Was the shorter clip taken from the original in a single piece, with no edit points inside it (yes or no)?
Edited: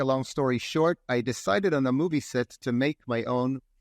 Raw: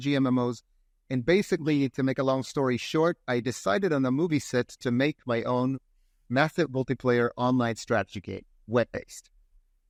yes